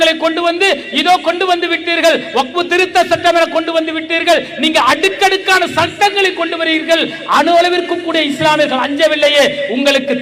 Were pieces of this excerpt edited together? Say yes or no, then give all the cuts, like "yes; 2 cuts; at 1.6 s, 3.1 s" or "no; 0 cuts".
no; 0 cuts